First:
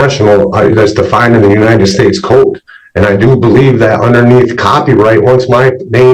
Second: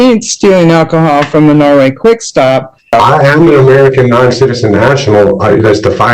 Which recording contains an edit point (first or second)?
second